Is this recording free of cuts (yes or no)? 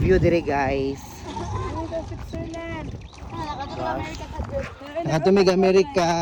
yes